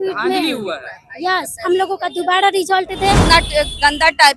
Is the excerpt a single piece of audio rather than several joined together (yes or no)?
no